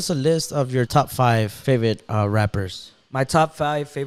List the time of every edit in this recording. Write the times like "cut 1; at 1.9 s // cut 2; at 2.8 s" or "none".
none